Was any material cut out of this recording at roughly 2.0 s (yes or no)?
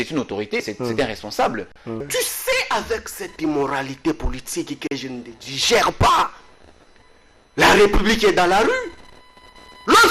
yes